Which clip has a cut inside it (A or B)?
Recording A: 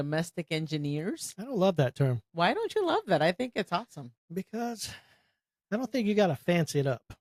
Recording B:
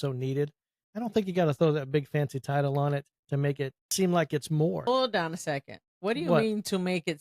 B